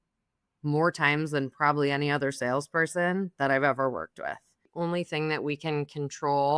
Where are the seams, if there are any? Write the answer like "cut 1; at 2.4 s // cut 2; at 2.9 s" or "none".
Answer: cut 1; at 4.6 s